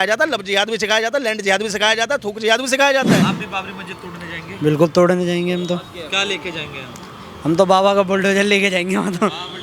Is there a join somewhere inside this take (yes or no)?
yes